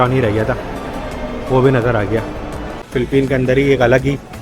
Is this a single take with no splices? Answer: no; 1 cut; at 2.8 s

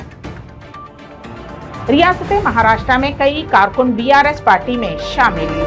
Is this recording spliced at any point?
yes; 1 cut; at 1.5 s

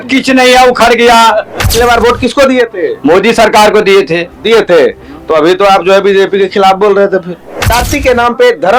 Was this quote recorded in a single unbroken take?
no; 2 cuts; at 1.6 s, 7.7 s

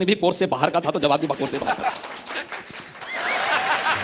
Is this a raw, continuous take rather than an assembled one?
yes; 0 cuts

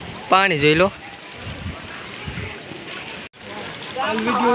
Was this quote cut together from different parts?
yes; 1 cut; at 3.3 s

